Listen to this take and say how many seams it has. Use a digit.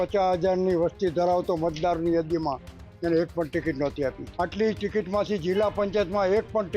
1